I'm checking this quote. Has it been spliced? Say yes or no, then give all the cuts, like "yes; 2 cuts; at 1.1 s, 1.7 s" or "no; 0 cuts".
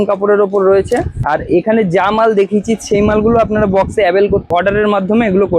yes; 2 cuts; at 1.1 s, 4.5 s